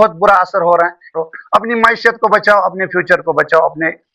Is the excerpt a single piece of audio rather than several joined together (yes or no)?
no